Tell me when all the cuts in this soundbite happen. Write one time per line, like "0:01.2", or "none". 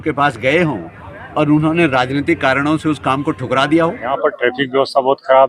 0:04.2